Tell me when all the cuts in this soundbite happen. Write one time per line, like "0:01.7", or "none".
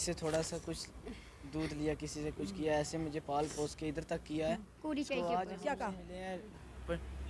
0:05.6